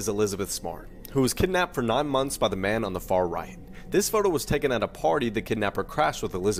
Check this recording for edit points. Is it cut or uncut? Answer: uncut